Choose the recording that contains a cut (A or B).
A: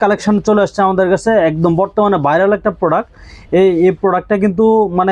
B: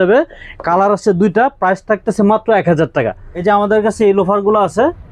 B